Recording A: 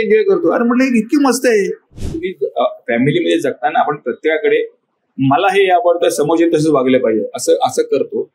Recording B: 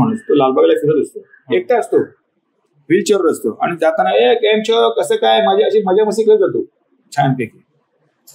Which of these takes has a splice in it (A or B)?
A